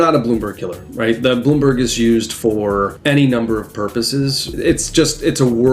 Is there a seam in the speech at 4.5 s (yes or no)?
yes